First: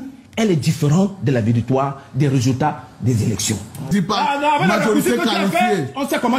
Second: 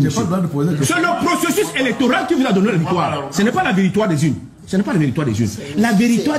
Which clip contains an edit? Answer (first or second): first